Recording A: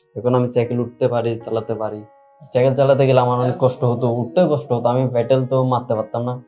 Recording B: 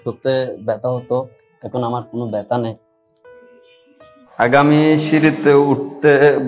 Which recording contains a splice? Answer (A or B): B